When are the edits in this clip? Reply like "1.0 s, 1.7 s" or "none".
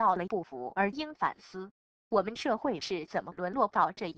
none